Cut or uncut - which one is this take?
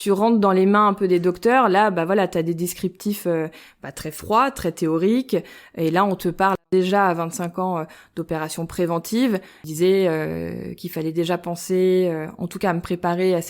cut